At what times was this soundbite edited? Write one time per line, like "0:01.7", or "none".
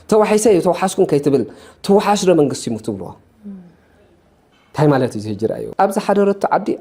0:05.6